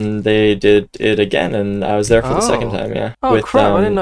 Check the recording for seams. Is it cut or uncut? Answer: cut